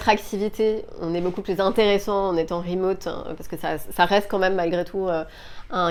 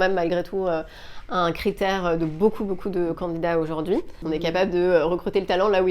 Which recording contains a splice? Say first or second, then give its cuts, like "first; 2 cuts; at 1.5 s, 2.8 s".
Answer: second; 1 cut; at 4.2 s